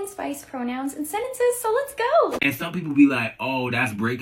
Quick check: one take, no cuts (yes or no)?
no